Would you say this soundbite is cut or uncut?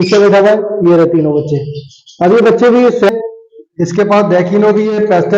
cut